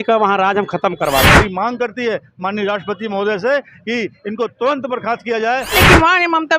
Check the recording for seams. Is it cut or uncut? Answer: cut